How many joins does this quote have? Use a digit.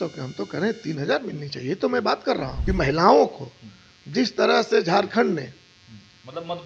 1